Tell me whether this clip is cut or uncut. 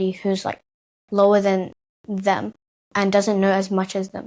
uncut